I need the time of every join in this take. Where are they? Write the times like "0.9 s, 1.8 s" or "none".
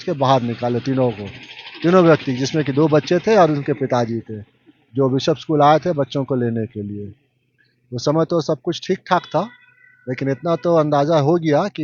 none